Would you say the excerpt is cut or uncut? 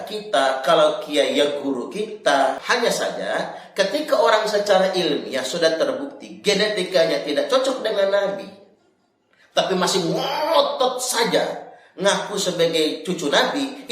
cut